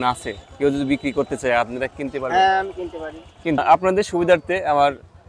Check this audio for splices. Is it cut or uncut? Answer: cut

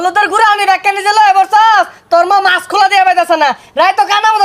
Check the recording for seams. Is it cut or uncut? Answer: uncut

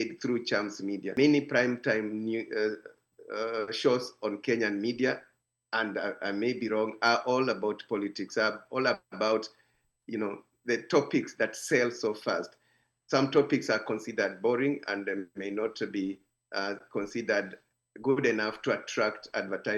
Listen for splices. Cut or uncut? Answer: cut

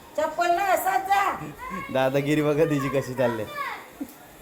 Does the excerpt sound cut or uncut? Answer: uncut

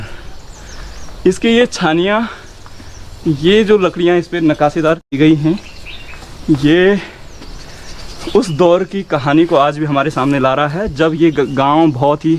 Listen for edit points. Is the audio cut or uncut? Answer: uncut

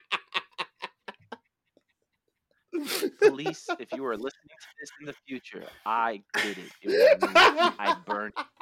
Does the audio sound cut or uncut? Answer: uncut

